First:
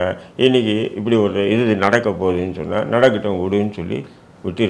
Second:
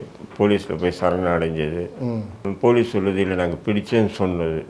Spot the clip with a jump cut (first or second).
second